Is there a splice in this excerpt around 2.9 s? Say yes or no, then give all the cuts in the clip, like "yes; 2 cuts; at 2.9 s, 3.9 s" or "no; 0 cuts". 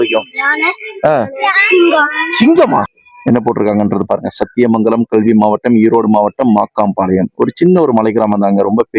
yes; 1 cut; at 2.9 s